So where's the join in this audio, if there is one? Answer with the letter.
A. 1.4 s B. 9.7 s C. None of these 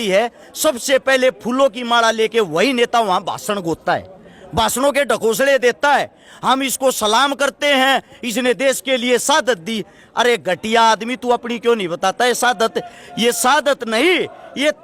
C